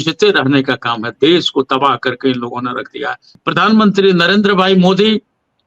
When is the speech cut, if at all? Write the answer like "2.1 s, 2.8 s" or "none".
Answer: 3.3 s